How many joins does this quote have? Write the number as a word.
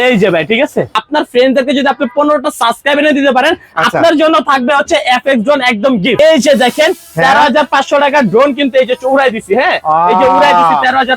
two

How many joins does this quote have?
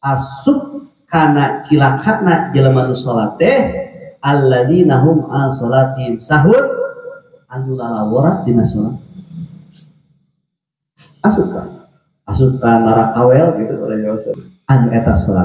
one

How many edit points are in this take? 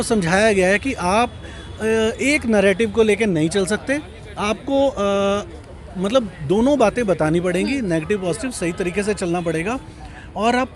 zero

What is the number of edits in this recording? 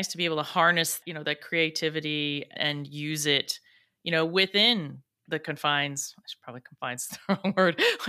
two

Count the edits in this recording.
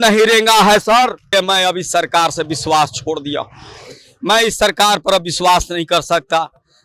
one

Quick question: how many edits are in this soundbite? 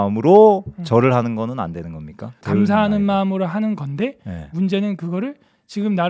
one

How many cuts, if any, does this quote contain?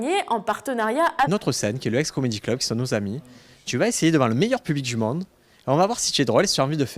zero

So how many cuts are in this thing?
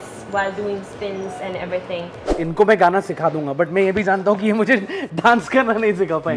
one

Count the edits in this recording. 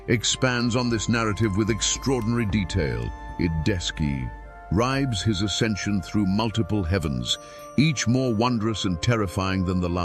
zero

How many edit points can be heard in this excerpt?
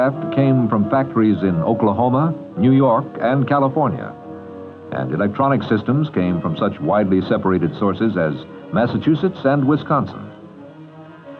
one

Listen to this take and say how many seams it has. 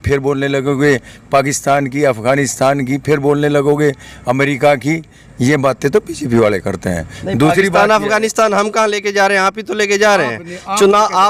zero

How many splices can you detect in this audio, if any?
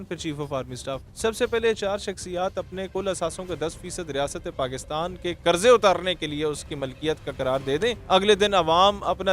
two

